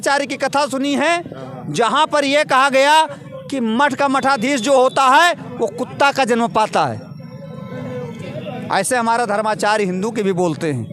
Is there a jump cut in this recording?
no; 0 cuts

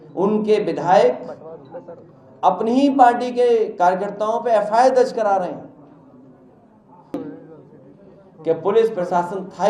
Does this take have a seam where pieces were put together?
no; 0 cuts

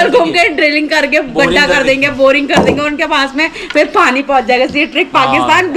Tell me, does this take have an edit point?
no; 0 cuts

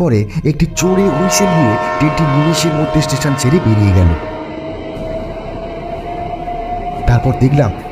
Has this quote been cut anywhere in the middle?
no; 0 cuts

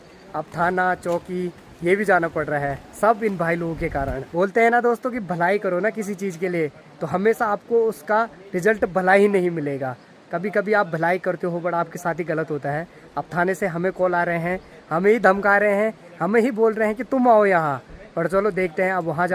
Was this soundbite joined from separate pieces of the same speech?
no; 0 cuts

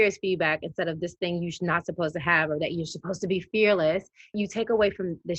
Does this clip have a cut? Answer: yes; 1 cut; at 4.4 s

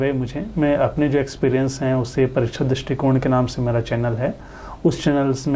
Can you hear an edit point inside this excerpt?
no; 0 cuts

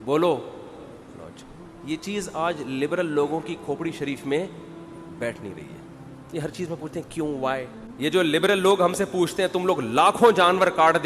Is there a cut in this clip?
yes; 1 cut; at 7.8 s

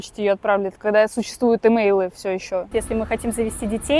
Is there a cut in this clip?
yes; 1 cut; at 2.7 s

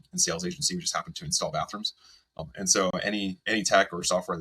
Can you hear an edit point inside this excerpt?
no; 0 cuts

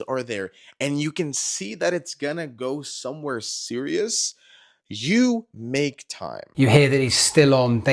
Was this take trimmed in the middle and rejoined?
yes; 1 cut; at 6.4 s

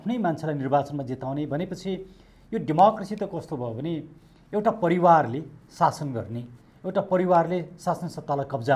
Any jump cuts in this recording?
no; 0 cuts

